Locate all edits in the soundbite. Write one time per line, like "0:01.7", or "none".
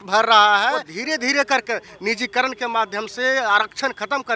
0:00.9